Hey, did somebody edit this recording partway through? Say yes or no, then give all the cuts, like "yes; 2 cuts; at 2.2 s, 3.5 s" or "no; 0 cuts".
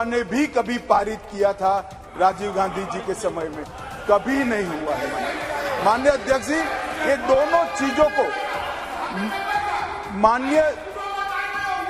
no; 0 cuts